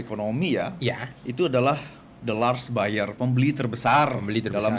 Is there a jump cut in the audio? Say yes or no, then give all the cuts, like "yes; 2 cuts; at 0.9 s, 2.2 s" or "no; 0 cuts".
no; 0 cuts